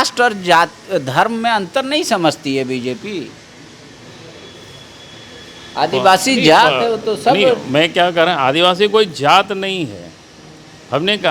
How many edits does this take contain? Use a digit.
0